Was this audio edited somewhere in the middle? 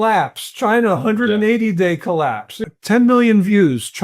yes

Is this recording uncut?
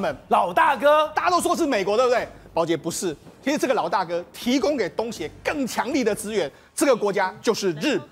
yes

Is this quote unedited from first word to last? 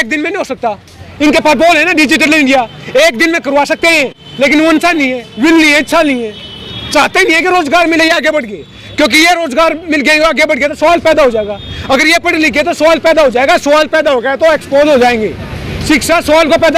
yes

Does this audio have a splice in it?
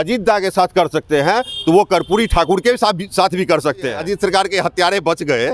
yes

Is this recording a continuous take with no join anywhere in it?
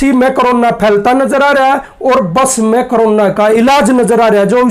yes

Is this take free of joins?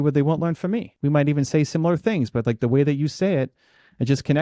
no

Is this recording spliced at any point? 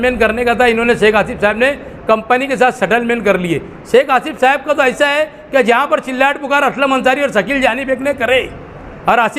no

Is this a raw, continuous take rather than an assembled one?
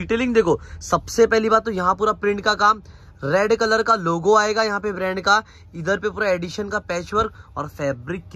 yes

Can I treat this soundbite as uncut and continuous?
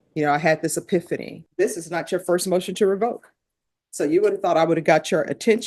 no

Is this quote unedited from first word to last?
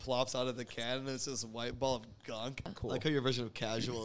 no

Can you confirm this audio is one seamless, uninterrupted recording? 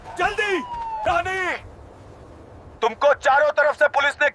no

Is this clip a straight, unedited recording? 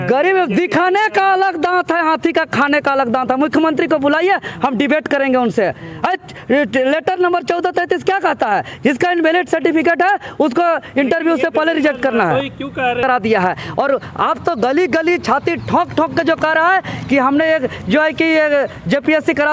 no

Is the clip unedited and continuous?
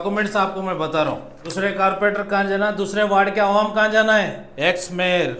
no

